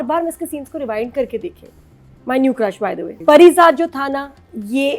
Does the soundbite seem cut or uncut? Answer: cut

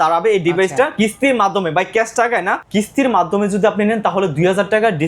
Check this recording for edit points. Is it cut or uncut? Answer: cut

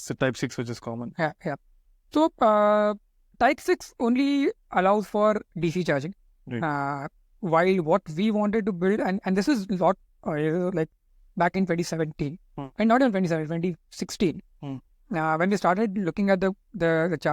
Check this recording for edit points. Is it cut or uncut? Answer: uncut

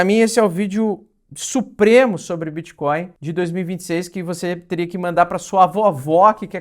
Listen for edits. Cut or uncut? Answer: cut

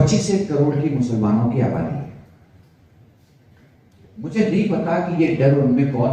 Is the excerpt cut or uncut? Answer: uncut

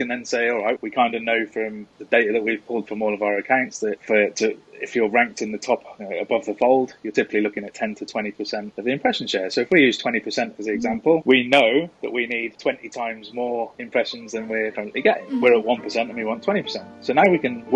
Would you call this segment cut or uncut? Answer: uncut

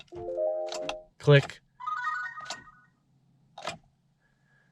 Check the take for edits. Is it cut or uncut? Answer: uncut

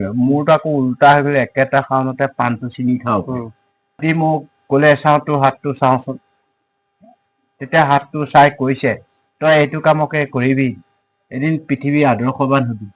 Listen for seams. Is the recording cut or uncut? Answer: cut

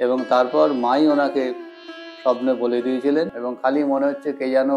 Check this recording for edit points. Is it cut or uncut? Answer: cut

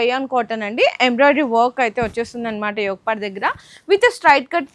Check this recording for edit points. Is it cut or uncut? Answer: uncut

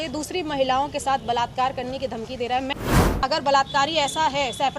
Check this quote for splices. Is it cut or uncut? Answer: cut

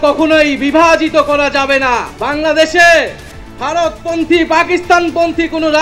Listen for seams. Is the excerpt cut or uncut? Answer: cut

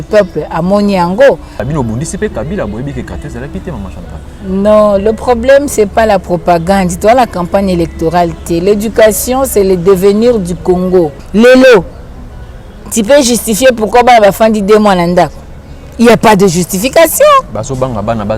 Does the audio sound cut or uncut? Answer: cut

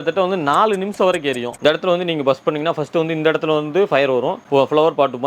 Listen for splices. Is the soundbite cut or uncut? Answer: cut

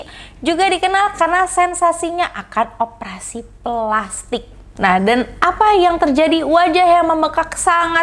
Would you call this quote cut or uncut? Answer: cut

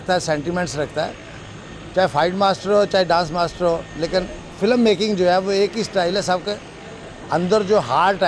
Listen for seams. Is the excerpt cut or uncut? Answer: uncut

